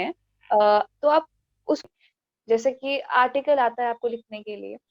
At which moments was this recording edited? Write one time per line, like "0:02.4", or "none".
0:01.8